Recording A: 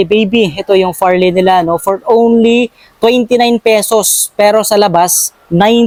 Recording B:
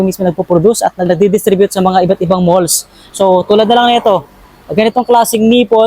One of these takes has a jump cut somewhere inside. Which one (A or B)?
B